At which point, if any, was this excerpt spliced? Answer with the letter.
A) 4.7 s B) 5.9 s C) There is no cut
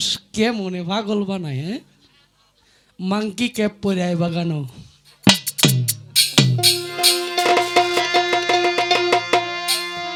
C